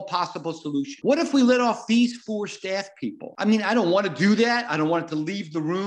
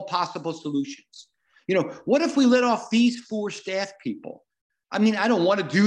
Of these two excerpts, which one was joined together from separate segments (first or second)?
first